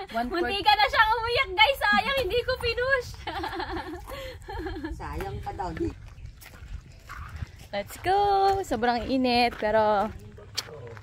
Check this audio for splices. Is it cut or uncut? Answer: cut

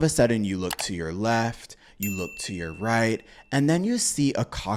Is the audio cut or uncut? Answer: uncut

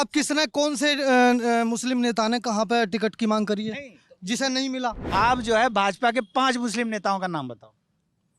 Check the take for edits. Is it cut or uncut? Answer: cut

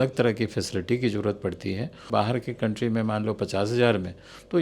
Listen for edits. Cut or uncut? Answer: cut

